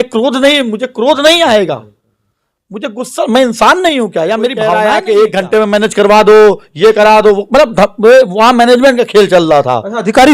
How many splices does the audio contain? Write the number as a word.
one